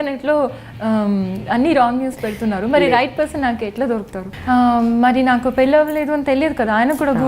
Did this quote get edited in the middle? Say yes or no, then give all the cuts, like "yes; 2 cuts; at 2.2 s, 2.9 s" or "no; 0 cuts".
yes; 1 cut; at 4.2 s